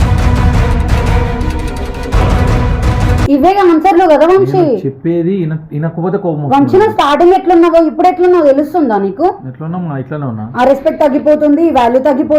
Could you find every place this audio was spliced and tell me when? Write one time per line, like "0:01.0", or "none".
0:03.3